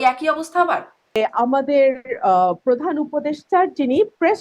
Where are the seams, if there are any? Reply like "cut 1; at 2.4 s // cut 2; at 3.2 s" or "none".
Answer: cut 1; at 1.1 s